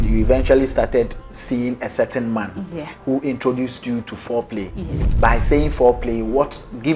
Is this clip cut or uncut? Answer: uncut